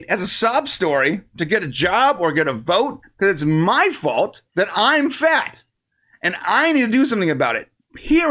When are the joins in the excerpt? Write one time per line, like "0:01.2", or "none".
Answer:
0:03.0